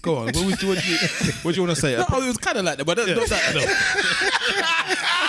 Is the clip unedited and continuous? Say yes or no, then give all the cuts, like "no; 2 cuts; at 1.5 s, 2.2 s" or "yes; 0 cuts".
yes; 0 cuts